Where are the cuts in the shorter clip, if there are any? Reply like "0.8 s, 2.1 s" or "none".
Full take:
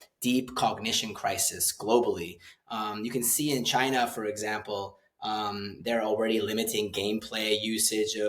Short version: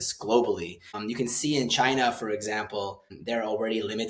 0.9 s, 3.1 s